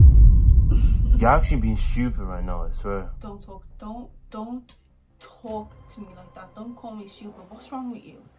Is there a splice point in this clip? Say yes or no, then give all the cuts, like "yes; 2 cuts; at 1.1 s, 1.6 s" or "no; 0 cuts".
no; 0 cuts